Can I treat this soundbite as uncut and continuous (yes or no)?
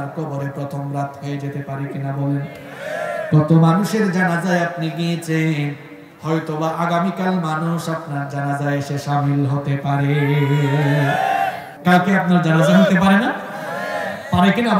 no